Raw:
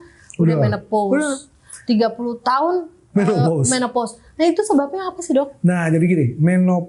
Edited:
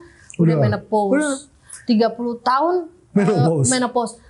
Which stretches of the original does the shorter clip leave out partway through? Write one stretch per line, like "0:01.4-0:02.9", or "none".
none